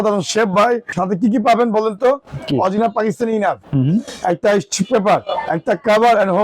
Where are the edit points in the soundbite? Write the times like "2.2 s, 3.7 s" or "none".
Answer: 0.9 s